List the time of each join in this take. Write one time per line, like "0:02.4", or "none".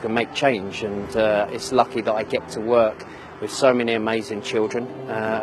none